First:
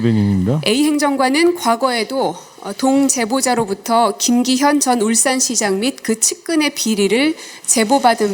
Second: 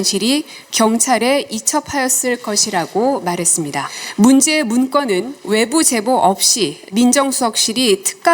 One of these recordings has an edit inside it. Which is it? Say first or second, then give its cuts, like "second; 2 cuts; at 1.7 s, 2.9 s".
second; 3 cuts; at 4.0 s, 5.4 s, 6.8 s